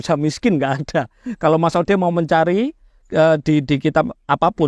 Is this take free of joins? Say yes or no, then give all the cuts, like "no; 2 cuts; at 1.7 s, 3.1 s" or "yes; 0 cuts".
yes; 0 cuts